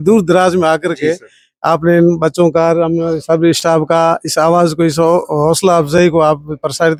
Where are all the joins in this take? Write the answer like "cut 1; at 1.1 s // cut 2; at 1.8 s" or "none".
none